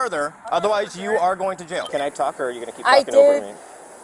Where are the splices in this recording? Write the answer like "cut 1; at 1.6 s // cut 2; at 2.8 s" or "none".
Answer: cut 1; at 1.8 s